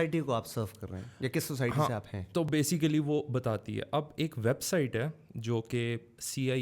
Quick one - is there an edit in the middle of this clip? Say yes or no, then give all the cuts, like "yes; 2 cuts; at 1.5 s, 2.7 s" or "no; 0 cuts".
no; 0 cuts